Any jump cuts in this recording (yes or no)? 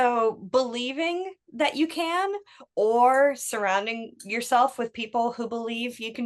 no